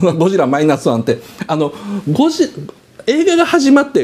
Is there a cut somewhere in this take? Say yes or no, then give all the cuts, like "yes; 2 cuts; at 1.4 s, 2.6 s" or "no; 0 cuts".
no; 0 cuts